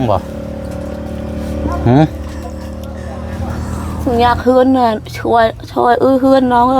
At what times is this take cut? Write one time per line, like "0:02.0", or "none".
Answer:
0:04.0

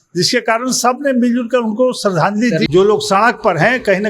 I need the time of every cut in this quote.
0:02.7

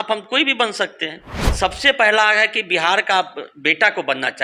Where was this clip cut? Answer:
0:01.3

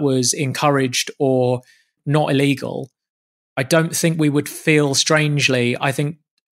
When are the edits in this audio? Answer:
0:02.0

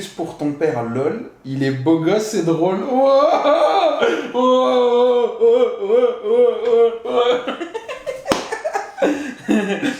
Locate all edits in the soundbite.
none

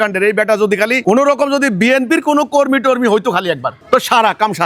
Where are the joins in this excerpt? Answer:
none

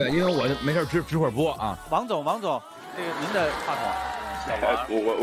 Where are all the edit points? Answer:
0:01.8

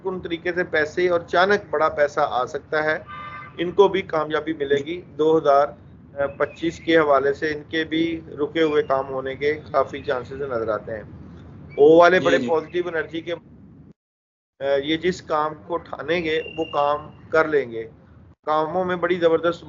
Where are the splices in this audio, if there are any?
none

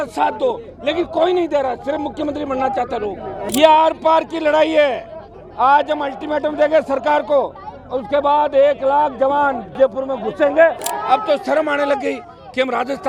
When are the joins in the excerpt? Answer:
0:03.5
0:09.7
0:10.9

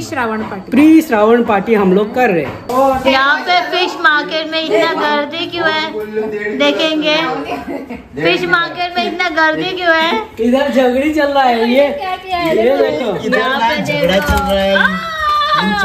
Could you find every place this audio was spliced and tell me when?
none

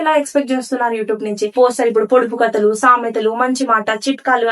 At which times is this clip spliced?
0:01.5

